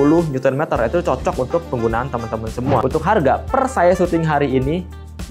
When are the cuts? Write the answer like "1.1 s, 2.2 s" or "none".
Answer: 2.8 s